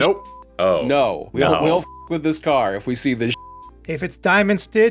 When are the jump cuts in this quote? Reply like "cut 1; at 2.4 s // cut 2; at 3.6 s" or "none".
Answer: cut 1; at 3.8 s